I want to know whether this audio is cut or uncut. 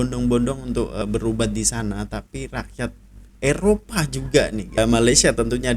cut